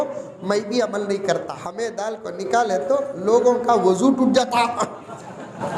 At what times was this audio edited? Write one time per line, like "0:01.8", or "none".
0:01.6